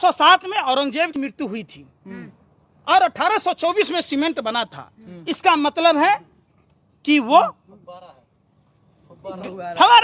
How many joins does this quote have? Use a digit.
1